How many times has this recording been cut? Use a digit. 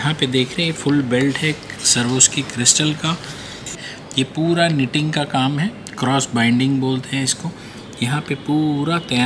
1